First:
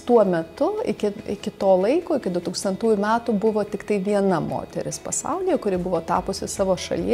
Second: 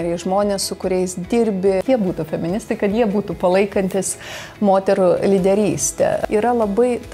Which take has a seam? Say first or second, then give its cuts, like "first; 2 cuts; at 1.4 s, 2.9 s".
second; 2 cuts; at 1.8 s, 6.2 s